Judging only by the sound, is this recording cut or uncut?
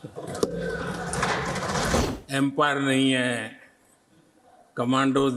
cut